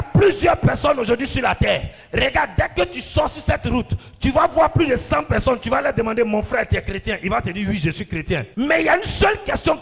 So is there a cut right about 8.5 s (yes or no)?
yes